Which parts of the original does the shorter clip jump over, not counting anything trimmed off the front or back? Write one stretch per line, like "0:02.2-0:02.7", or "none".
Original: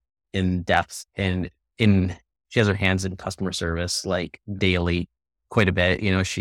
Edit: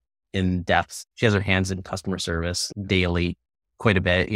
0:01.0-0:02.4
0:04.0-0:04.3

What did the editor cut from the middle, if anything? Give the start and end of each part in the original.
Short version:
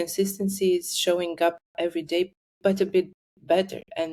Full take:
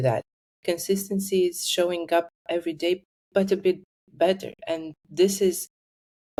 none

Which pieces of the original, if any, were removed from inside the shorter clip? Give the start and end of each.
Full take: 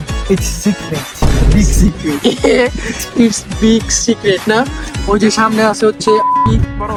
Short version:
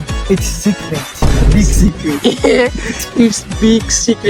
none

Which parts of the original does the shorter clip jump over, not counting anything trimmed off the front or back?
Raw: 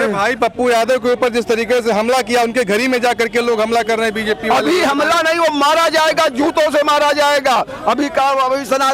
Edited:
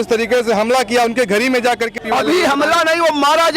0:03.3-0:04.3

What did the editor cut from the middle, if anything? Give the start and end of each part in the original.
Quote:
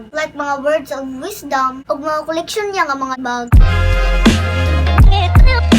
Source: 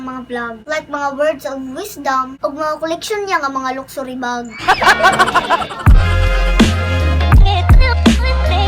0:03.9-0:05.7

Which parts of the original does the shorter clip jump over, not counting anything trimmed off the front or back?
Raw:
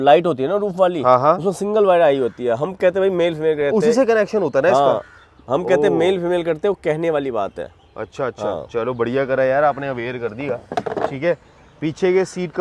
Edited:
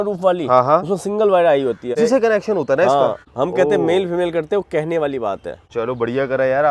0:02.5-0:03.8
0:05.1-0:05.4
0:07.8-0:08.6

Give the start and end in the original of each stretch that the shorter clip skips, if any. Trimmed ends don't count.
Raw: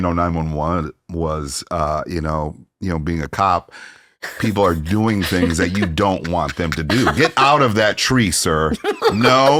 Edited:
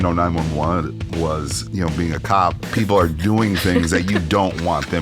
0:01.6-0:02.6
0:03.7-0:04.3

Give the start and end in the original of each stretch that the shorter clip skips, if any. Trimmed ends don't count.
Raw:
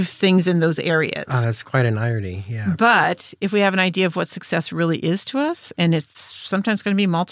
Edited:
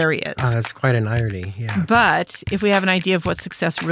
none

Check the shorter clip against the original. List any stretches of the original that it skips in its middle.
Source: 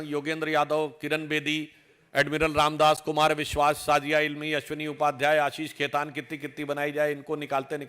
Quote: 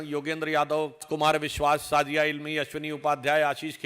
0:01.0-0:03.0

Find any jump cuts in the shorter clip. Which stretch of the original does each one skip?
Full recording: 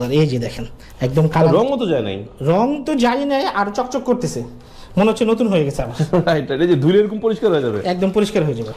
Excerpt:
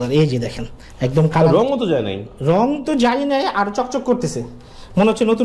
none

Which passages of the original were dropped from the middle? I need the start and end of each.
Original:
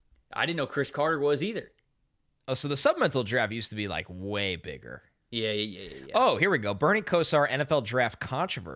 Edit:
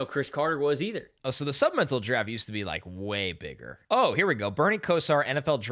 0:01.7-0:02.3
0:04.9-0:05.9

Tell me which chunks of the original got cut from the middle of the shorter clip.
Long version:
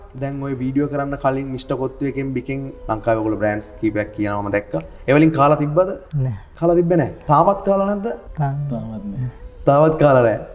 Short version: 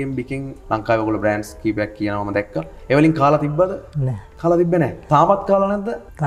none

